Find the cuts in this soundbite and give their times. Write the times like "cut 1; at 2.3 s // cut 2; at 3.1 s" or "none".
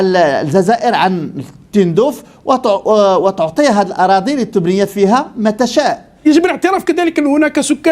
cut 1; at 6.1 s